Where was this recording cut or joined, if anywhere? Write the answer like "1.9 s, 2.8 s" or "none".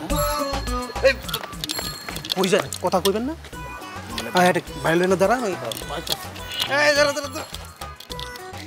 none